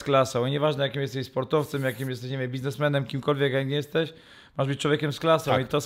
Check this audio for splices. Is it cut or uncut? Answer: uncut